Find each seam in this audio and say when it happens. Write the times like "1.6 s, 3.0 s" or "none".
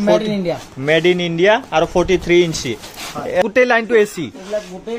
3.5 s